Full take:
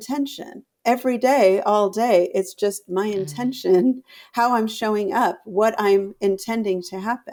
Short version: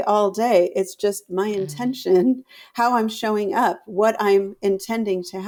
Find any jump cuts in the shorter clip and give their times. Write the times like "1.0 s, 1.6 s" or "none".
none